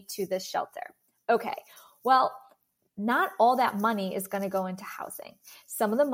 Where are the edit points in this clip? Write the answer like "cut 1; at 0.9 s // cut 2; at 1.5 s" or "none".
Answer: none